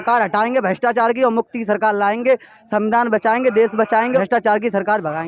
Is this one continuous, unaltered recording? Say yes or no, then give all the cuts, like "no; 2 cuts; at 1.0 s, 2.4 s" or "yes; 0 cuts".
no; 1 cut; at 4.2 s